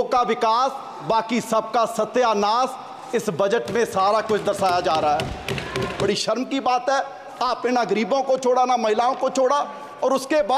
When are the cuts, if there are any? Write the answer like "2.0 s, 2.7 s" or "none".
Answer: 6.0 s